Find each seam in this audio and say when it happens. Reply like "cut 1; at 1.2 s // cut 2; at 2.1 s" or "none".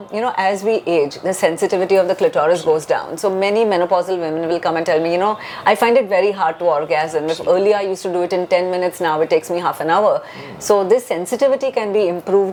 none